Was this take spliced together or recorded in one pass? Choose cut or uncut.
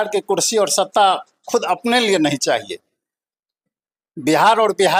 uncut